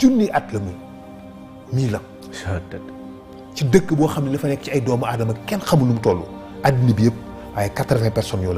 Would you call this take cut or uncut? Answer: uncut